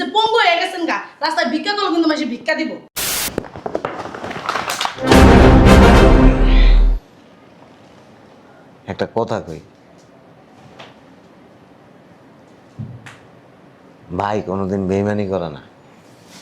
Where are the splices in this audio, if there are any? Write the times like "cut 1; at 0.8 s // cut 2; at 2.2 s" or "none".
cut 1; at 3.1 s